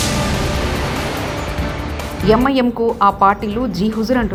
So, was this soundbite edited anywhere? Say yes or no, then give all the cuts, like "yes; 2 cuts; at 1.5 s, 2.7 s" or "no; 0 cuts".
no; 0 cuts